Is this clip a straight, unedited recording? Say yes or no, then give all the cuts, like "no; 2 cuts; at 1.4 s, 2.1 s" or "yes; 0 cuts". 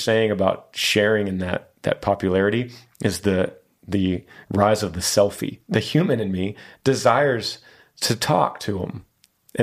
no; 1 cut; at 5.5 s